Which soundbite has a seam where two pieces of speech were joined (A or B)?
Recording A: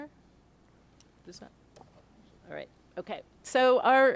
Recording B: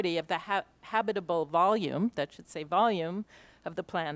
A